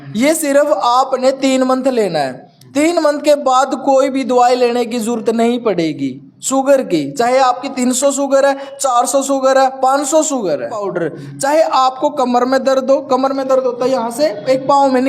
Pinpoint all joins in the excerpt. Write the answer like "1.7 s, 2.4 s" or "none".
10.9 s